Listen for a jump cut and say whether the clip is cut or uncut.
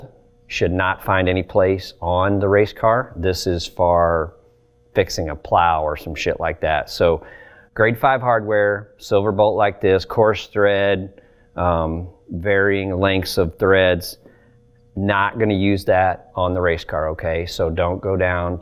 uncut